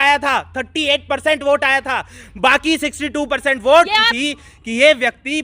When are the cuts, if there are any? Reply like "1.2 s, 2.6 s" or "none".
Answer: 4.3 s